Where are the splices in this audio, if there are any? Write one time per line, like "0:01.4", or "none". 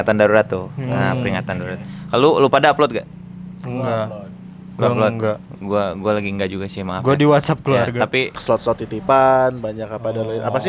0:08.4